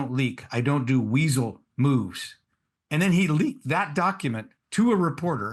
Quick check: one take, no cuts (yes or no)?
yes